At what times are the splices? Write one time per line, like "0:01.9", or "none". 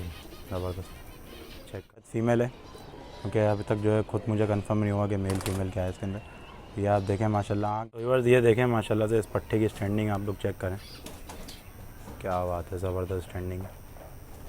0:02.1
0:07.7